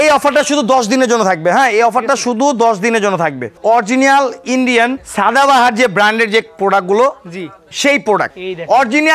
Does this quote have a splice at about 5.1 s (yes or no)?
yes